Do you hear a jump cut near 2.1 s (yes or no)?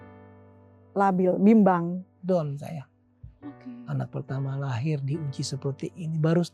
yes